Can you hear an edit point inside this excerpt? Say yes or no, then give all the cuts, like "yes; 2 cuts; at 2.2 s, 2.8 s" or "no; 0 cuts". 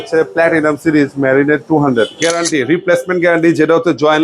yes; 1 cut; at 2.2 s